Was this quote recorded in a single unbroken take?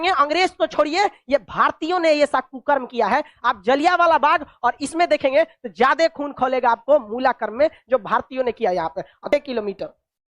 no; 1 cut; at 9.2 s

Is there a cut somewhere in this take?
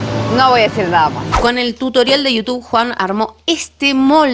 yes; 1 cut; at 1.4 s

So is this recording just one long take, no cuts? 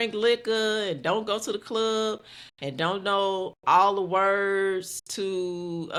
yes; 0 cuts

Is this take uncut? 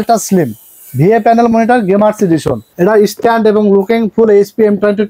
no; 1 cut; at 2.6 s

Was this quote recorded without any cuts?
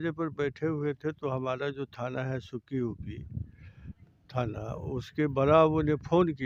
yes; 0 cuts

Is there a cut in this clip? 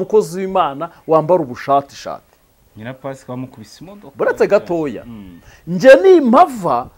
no; 0 cuts

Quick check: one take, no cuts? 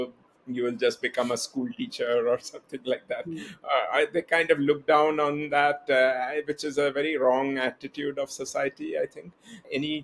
yes; 0 cuts

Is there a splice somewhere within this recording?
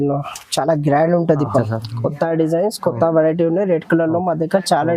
yes; 1 cut; at 1.6 s

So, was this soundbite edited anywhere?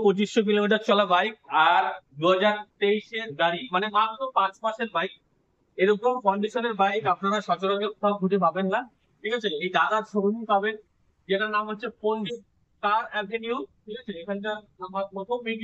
no; 0 cuts

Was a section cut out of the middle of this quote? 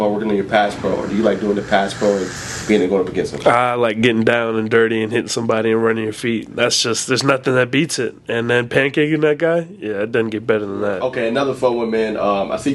yes; 1 cut; at 11.0 s

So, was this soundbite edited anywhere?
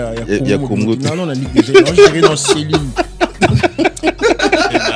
no; 0 cuts

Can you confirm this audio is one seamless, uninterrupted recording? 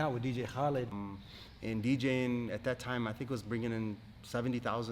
no; 1 cut; at 0.9 s

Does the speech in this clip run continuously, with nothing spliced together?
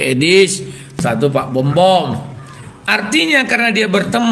no; 1 cut; at 1.0 s

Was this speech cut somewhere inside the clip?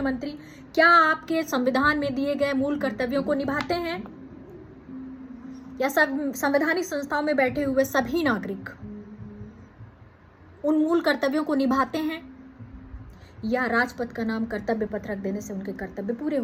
no; 0 cuts

